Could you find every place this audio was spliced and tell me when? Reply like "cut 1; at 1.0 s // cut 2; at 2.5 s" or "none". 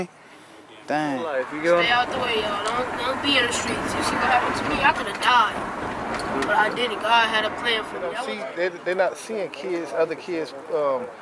cut 1; at 1.5 s // cut 2; at 8.2 s